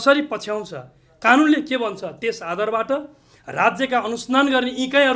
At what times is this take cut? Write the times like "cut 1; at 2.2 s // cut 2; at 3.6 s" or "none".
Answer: none